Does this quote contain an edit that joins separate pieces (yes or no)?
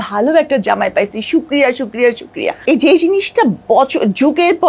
yes